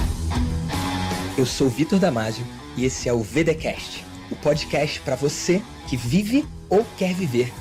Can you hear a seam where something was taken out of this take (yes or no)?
no